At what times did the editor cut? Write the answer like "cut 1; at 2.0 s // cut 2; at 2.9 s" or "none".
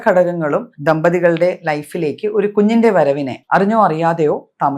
cut 1; at 3.3 s

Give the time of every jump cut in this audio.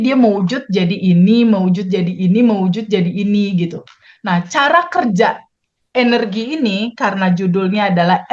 none

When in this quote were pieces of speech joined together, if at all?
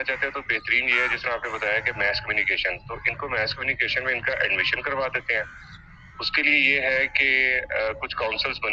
none

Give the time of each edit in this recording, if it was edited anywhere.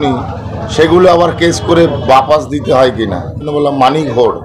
cut 1; at 3.5 s

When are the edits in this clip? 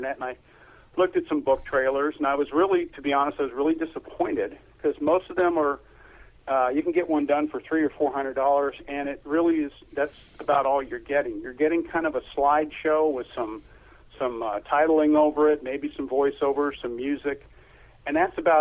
none

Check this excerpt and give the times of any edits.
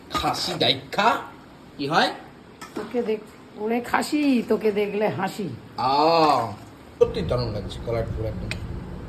cut 1; at 6.9 s

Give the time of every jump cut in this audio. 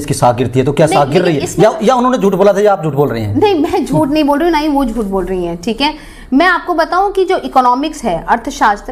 none

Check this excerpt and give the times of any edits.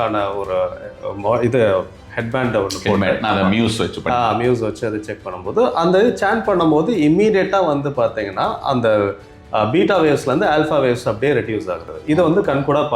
cut 1; at 11.9 s

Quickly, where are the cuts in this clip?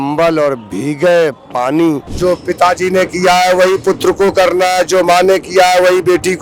cut 1; at 2.1 s

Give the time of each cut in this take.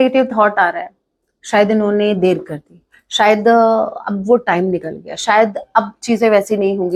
none

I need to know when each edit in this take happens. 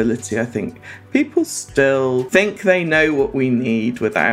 cut 1; at 2.3 s

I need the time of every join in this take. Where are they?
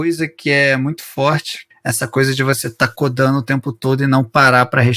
cut 1; at 1.6 s

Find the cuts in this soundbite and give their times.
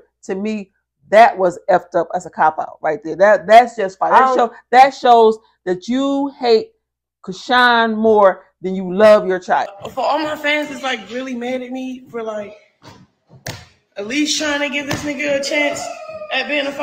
cut 1; at 9.8 s

